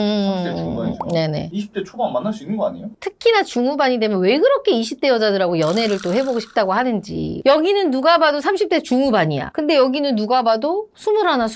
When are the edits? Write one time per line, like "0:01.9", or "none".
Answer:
0:02.9
0:07.4